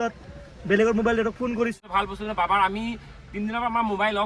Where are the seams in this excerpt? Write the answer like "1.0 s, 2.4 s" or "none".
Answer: 1.8 s